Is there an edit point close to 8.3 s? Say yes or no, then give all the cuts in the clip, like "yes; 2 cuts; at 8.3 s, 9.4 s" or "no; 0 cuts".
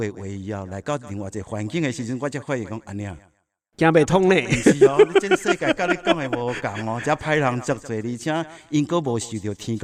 no; 0 cuts